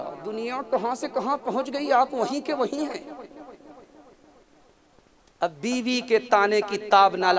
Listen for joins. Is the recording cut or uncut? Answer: uncut